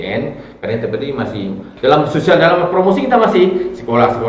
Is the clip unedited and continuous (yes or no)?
yes